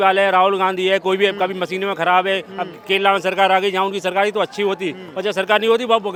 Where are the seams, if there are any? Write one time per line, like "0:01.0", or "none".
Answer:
none